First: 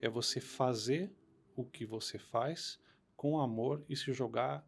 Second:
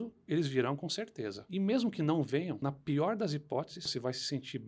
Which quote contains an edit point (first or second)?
second